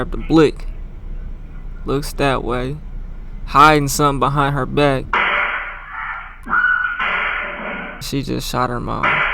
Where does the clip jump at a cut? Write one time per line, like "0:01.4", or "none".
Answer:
0:05.0
0:06.3
0:08.1